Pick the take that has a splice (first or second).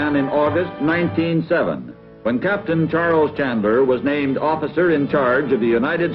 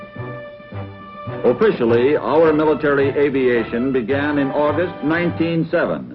first